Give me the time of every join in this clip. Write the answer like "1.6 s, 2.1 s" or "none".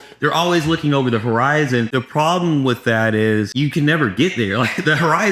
1.9 s, 3.5 s